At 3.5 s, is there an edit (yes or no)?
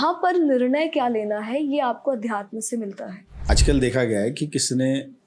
yes